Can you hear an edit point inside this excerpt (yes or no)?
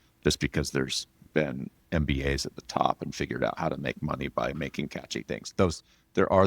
no